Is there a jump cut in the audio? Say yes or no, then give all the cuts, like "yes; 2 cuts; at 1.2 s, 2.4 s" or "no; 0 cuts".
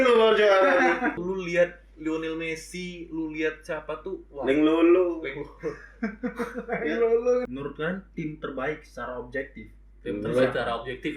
yes; 2 cuts; at 1.2 s, 7.4 s